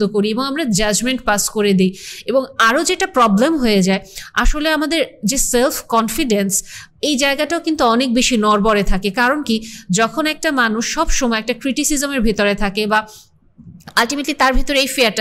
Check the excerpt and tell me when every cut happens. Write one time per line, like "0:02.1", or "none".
none

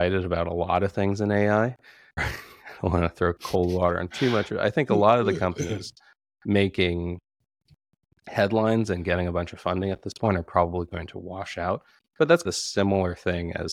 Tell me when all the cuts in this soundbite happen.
0:02.3

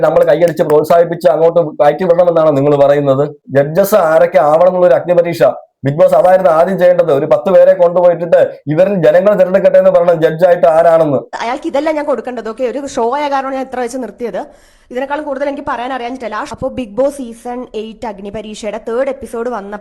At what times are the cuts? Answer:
0:03.4
0:11.3

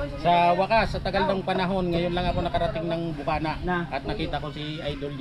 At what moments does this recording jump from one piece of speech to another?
none

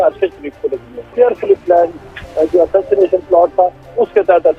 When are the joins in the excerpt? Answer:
0:01.0

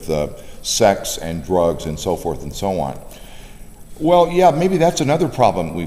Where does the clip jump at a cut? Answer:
none

